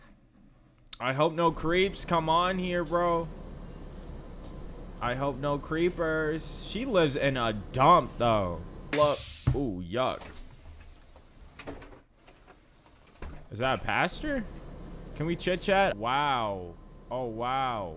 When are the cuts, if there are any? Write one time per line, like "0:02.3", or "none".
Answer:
0:08.9
0:15.9